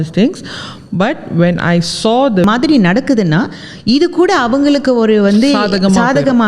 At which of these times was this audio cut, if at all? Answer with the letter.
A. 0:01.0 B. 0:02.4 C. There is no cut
B